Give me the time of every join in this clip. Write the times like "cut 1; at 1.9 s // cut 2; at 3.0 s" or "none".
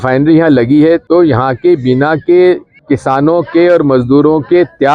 cut 1; at 1.0 s // cut 2; at 2.7 s